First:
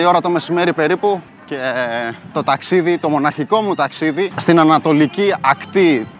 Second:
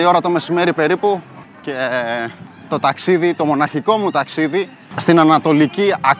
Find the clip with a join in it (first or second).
first